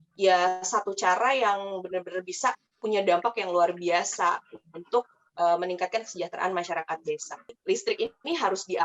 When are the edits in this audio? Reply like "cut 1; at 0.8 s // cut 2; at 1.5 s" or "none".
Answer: cut 1; at 7.5 s